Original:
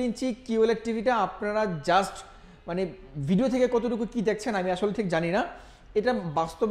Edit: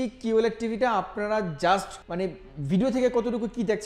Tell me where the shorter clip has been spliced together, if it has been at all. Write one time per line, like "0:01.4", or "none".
0:02.0